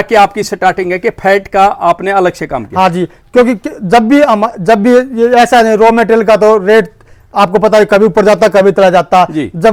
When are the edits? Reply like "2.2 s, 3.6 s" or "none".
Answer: none